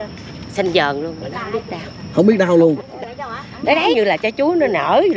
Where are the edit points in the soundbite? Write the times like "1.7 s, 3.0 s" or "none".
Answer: 3.9 s